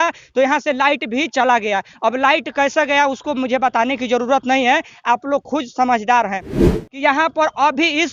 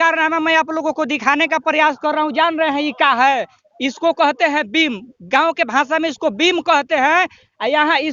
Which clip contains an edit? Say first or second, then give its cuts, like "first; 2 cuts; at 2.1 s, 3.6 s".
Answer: first; 1 cut; at 6.6 s